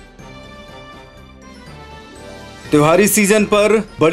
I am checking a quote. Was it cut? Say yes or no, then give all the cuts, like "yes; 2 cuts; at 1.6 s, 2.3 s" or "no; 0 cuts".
yes; 1 cut; at 2.6 s